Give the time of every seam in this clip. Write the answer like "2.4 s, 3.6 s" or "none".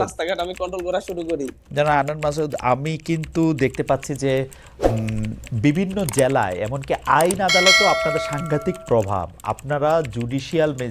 none